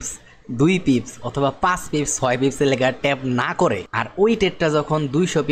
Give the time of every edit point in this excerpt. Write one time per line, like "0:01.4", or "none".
0:03.9